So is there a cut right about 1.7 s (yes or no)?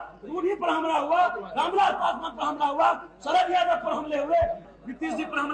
no